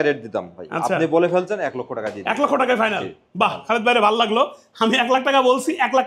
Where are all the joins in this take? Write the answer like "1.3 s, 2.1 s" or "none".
none